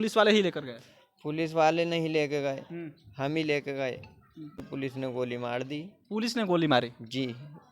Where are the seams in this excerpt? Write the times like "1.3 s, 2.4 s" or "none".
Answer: 4.6 s